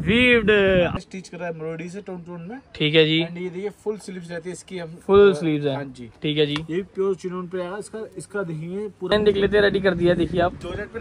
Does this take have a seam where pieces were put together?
yes; 2 cuts; at 0.9 s, 9.1 s

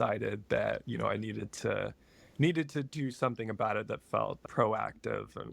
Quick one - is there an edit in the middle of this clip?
yes; 1 cut; at 4.4 s

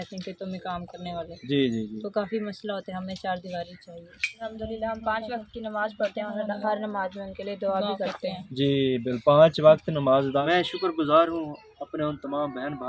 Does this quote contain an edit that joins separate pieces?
yes; 2 cuts; at 4.4 s, 10.4 s

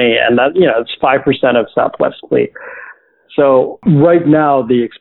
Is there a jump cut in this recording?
yes; 1 cut; at 3.8 s

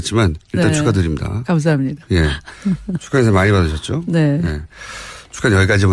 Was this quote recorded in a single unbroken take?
yes; 0 cuts

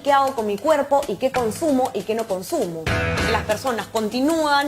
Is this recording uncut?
no; 1 cut; at 3.3 s

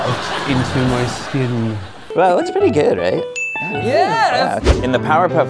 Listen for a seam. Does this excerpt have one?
yes; 2 cuts; at 2.1 s, 4.7 s

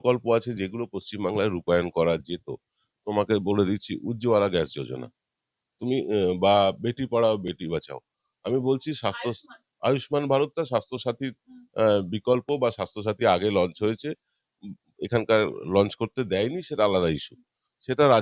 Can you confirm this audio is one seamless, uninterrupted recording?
yes; 0 cuts

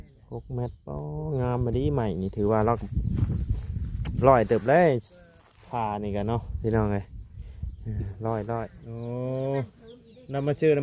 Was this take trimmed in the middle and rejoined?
yes; 1 cut; at 8.8 s

